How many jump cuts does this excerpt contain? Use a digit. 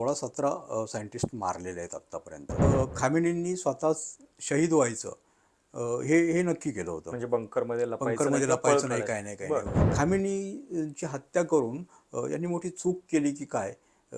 2